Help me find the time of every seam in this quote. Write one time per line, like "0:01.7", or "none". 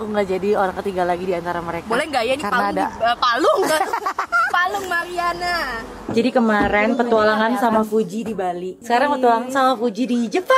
0:06.0
0:08.7